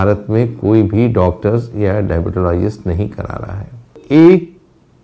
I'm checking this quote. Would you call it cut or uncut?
cut